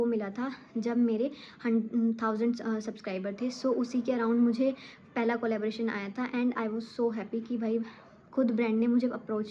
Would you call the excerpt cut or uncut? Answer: uncut